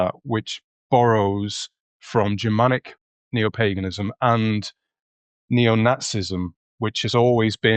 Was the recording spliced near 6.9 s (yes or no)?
no